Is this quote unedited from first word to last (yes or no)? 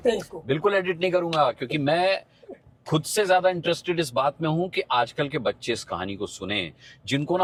yes